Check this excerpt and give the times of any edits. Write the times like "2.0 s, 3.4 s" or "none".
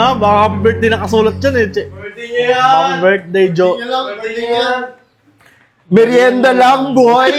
none